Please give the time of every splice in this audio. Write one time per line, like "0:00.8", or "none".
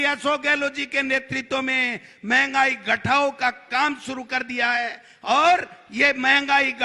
none

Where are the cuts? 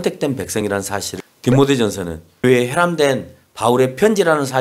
0:01.1
0:02.4

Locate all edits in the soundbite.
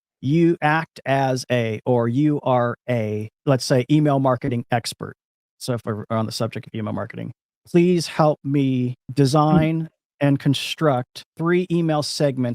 0:03.3
0:09.0
0:11.2

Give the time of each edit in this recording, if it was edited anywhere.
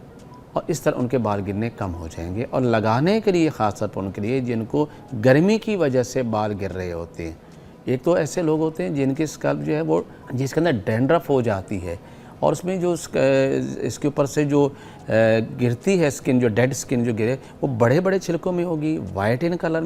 0:10.2

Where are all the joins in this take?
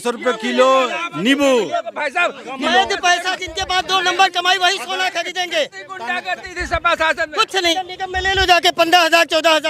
0:02.6
0:07.7

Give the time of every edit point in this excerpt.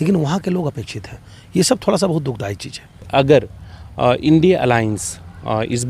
0:03.1

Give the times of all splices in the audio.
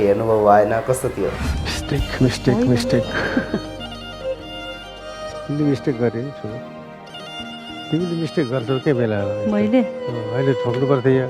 0:01.5

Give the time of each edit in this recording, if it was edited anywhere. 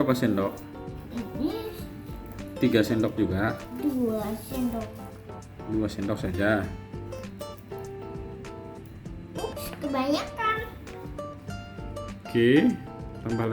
0:06.6
0:09.4
0:10.9
0:12.3

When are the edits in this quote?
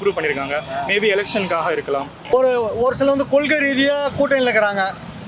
0:02.3

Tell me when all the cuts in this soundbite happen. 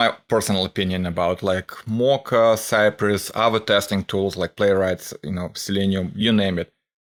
none

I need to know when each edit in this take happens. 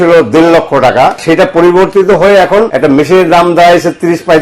0:01.2
0:02.7

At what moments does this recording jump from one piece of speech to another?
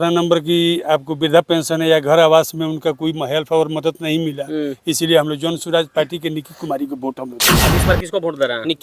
0:07.8

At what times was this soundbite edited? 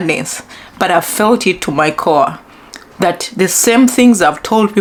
none

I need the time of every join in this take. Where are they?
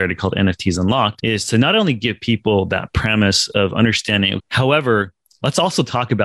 0:01.2
0:04.4

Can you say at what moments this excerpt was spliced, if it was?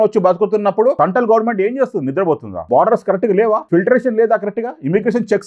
0:01.0
0:02.5
0:03.6

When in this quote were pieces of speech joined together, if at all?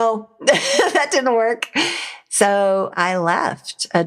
0:02.9

